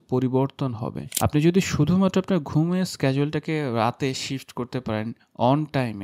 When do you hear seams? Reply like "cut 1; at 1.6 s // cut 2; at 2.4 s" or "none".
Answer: cut 1; at 1.0 s